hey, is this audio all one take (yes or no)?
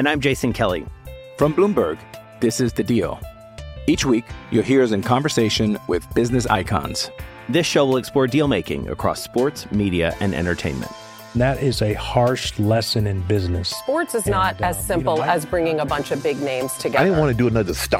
yes